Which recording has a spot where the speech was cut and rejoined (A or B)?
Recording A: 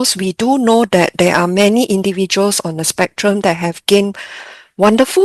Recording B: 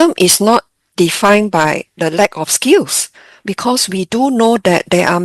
B